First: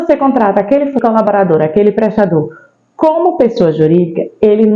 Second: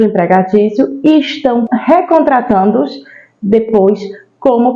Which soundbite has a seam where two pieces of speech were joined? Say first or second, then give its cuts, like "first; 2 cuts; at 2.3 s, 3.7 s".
first; 1 cut; at 1.0 s